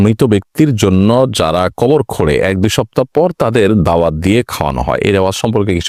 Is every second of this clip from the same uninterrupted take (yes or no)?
yes